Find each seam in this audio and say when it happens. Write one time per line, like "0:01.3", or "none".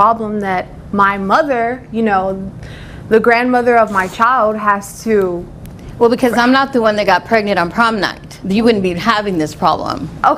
none